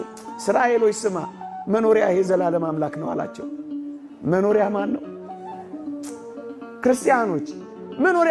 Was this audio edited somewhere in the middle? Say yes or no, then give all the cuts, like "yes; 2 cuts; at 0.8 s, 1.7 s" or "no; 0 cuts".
no; 0 cuts